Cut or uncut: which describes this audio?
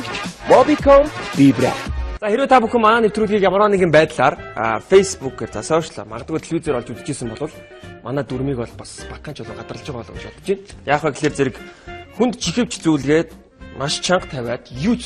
cut